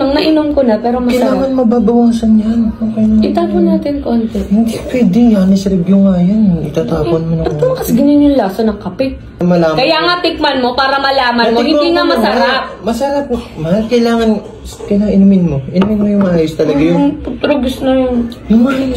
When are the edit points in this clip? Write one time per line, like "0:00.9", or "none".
0:09.4